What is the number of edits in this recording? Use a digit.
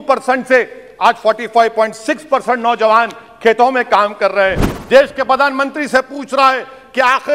1